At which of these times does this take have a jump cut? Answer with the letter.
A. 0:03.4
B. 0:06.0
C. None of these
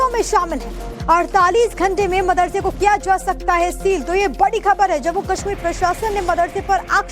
B